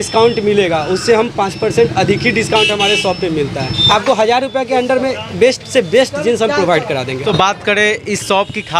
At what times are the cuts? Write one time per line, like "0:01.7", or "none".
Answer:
0:03.8
0:07.2